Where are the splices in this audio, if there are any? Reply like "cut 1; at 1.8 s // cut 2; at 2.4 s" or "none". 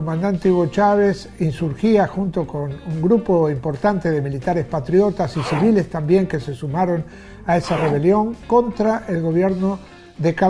none